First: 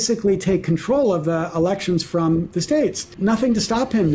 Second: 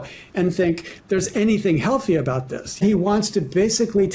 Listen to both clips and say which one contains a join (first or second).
second